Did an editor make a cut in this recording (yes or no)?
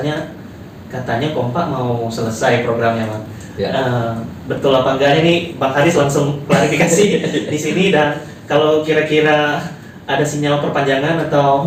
no